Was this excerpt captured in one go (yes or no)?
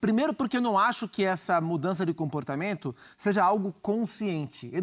yes